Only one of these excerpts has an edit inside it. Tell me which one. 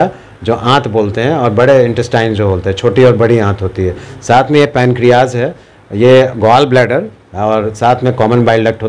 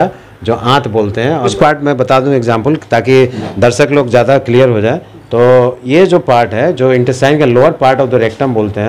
second; 1 cut; at 1.5 s

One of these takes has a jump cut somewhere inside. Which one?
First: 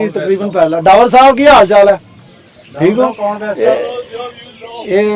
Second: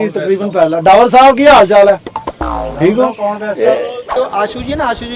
second; 1 cut; at 4.1 s

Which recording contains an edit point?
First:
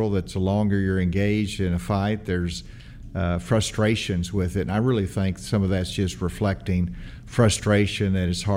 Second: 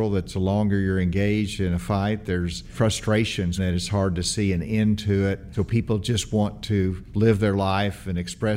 second; 4 cuts; at 2.7 s, 3.6 s, 5.5 s, 7.0 s

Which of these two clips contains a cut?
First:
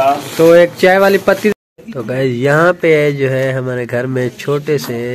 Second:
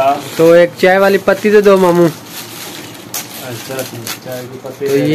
first; 1 cut; at 1.5 s

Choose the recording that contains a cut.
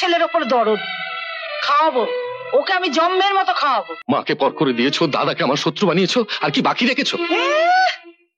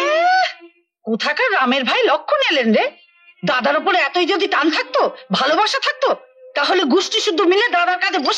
first; 1 cut; at 3.9 s

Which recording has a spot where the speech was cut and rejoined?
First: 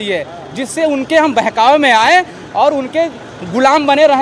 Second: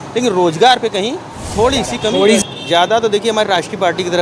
second; 1 cut; at 2.4 s

